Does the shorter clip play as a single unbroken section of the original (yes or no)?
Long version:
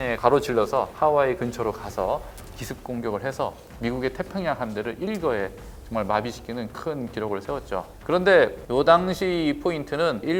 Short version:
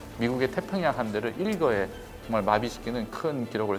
yes